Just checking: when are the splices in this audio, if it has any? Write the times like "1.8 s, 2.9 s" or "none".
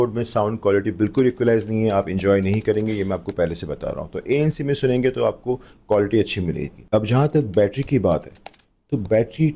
none